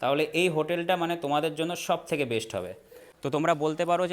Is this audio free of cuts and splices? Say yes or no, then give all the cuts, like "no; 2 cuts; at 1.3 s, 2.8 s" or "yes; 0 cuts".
no; 1 cut; at 3.1 s